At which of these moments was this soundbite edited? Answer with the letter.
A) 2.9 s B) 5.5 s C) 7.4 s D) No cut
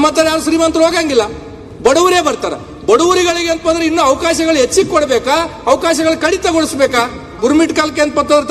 C